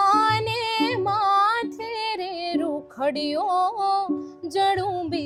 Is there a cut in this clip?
no; 0 cuts

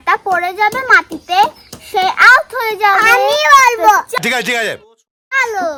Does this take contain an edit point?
no; 0 cuts

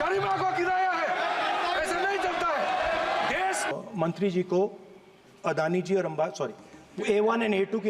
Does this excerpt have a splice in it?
yes; 1 cut; at 3.7 s

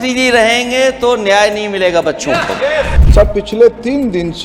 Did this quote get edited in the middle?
yes; 1 cut; at 3.0 s

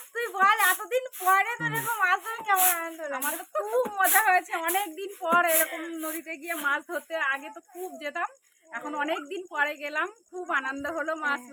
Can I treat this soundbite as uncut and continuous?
yes; 0 cuts

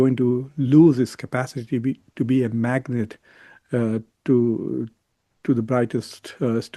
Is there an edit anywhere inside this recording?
no; 0 cuts

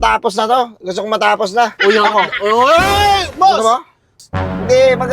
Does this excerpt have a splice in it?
yes; 1 cut; at 4.2 s

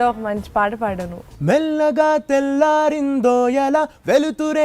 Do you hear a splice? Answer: yes; 1 cut; at 1.2 s

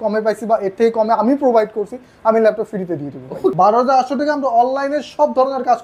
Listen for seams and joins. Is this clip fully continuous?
no; 1 cut; at 3.5 s

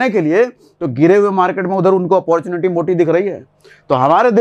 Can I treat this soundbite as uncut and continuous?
yes; 0 cuts

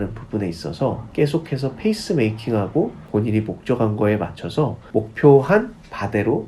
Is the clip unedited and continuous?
no; 1 cut; at 3.0 s

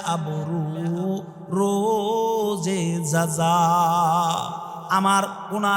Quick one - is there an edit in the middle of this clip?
yes; 1 cut; at 4.8 s

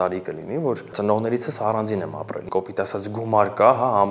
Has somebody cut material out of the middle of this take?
yes; 2 cuts; at 0.9 s, 2.4 s

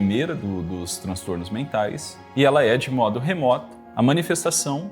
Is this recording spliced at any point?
yes; 2 cuts; at 2.1 s, 3.8 s

